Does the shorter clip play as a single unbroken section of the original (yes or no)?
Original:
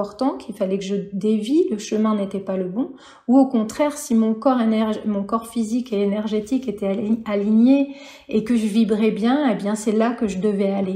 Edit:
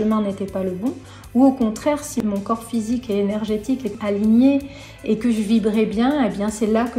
no